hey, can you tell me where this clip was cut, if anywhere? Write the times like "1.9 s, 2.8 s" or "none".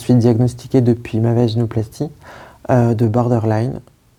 none